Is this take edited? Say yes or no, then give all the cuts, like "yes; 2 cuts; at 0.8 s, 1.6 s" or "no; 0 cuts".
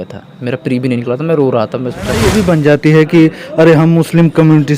yes; 1 cut; at 2.2 s